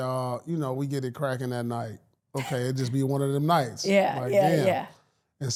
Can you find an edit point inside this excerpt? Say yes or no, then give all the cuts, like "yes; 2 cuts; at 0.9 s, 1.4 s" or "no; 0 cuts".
no; 0 cuts